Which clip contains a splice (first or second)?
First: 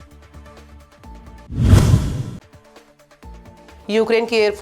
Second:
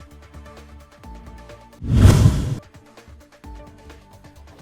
first